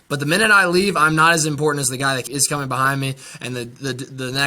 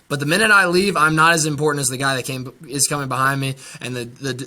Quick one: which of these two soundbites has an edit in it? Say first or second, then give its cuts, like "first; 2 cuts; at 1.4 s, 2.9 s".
first; 1 cut; at 2.3 s